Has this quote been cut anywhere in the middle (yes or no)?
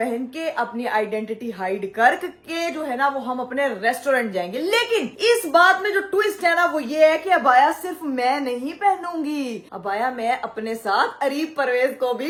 no